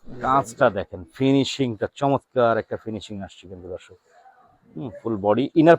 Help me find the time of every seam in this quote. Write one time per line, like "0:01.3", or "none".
none